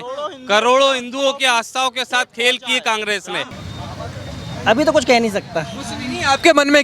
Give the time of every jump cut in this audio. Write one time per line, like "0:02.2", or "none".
0:03.6